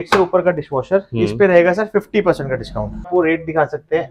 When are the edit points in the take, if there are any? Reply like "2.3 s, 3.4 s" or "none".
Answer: 3.1 s